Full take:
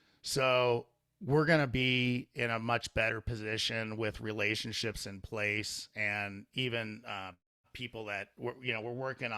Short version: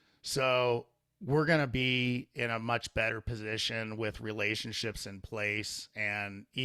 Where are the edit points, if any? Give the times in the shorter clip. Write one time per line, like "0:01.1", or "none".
none